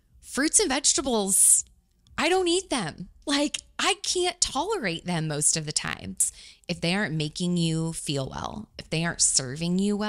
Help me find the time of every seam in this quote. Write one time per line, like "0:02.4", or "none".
0:06.3

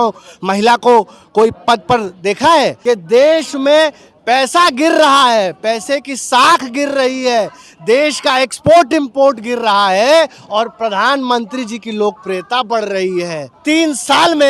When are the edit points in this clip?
0:02.8
0:13.4

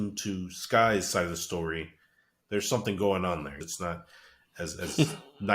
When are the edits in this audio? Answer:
0:02.4
0:03.6

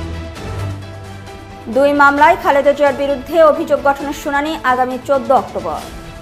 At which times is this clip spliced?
0:01.1

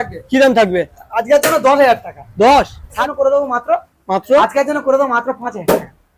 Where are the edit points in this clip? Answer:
0:03.0

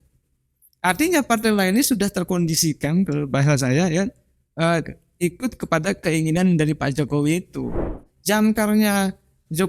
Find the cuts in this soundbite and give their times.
0:08.1

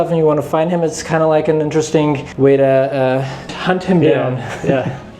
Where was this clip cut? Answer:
0:02.3
0:03.5

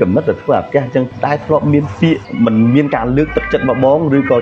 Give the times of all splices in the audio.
0:01.1
0:02.3

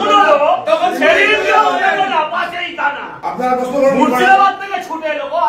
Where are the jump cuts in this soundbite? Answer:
0:03.1

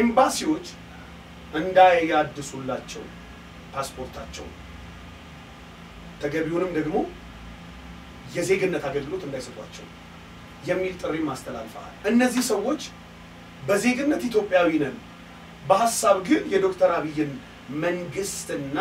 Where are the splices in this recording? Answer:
0:11.8

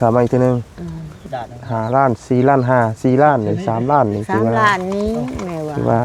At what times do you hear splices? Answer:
0:01.2

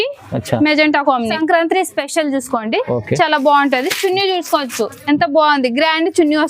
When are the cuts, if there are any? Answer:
0:01.3

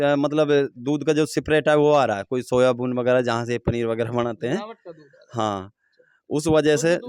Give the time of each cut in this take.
none

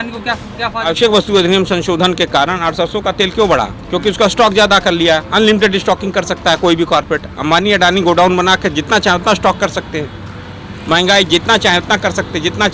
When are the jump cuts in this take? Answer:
0:00.9

